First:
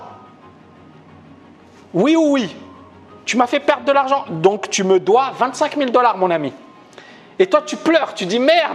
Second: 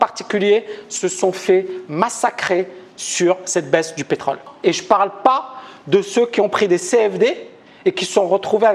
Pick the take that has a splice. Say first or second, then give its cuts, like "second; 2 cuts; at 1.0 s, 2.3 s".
second; 1 cut; at 4.5 s